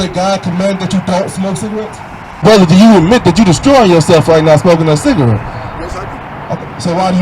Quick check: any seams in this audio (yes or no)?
yes